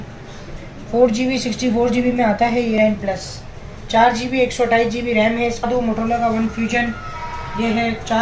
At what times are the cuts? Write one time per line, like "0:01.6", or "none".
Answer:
0:02.8
0:05.7